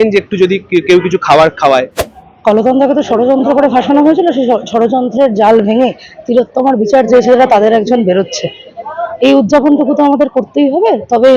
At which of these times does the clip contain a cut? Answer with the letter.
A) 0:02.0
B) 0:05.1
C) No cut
A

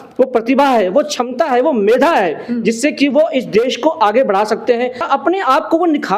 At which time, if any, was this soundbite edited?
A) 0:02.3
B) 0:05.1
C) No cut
B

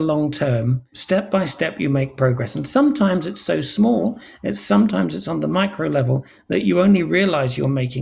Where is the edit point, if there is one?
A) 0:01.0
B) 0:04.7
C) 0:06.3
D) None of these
A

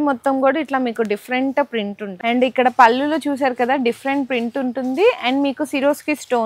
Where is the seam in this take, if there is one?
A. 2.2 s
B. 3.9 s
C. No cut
A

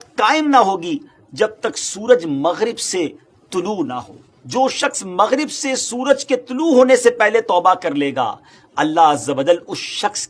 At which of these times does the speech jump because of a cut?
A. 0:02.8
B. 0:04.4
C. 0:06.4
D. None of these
B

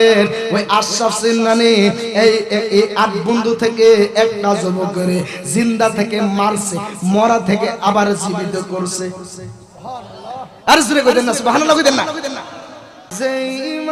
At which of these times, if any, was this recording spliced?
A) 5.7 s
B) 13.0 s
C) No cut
B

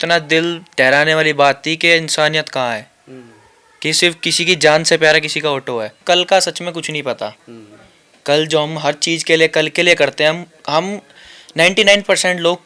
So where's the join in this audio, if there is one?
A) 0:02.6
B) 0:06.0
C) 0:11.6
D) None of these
B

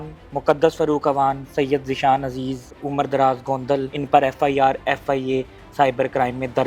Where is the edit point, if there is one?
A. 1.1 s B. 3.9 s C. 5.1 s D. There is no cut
B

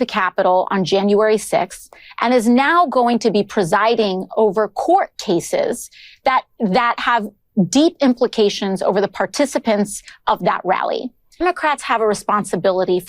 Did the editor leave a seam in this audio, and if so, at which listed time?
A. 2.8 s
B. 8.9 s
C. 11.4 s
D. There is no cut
C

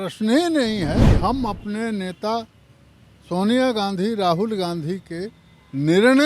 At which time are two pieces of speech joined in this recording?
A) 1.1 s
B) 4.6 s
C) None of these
A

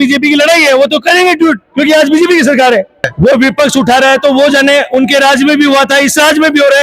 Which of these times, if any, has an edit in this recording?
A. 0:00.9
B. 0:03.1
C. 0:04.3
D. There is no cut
B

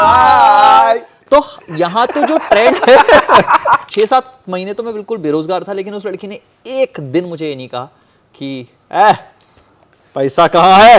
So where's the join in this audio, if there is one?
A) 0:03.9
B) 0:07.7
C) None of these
A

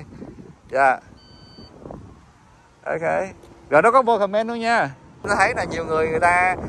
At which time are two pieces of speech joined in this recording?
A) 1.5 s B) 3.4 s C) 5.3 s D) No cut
C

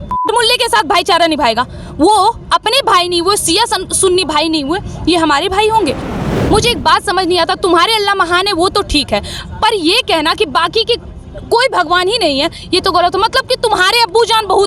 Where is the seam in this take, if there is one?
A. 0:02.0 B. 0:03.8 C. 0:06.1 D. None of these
C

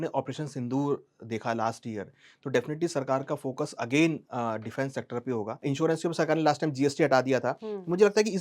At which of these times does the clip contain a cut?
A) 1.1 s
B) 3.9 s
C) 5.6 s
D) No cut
C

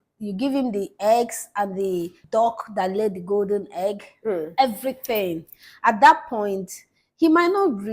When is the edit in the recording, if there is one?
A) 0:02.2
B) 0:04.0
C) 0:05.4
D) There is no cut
A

